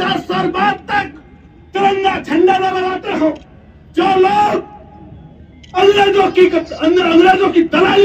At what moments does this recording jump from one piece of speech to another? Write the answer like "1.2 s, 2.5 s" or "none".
none